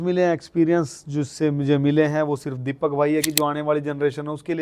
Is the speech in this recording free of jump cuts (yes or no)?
no